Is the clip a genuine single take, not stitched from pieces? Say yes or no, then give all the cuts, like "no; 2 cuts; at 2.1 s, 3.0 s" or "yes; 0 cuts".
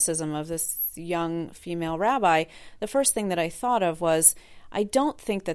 yes; 0 cuts